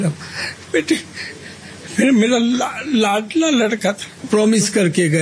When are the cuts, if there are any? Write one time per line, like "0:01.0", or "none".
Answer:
0:04.2

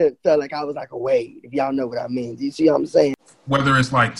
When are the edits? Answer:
0:03.3

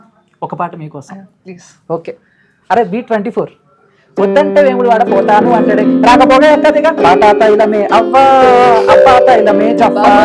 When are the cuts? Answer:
none

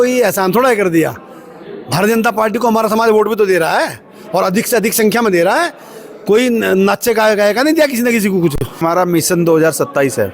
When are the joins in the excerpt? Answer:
0:08.8

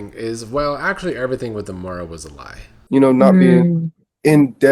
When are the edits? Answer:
0:02.8

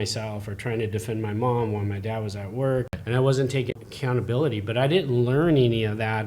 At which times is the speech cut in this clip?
0:02.9
0:03.8

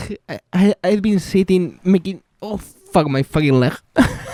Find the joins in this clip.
none

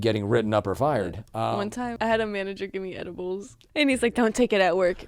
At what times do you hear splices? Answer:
0:01.3
0:03.6

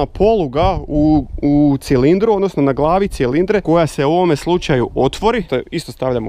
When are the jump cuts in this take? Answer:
0:03.6
0:05.5

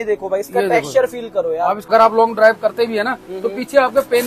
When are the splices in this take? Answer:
0:01.9

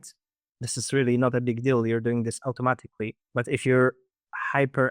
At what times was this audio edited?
0:03.2

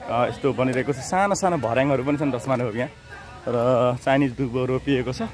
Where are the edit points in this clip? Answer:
none

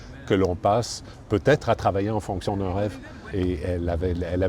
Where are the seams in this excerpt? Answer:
0:03.2

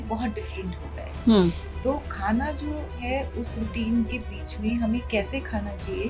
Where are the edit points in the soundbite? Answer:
none

